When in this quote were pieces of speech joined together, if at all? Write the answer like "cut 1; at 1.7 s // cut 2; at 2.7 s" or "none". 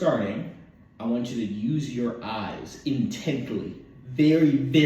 none